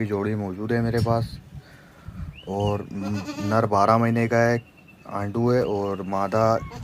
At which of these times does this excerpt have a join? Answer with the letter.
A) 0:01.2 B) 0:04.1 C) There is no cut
C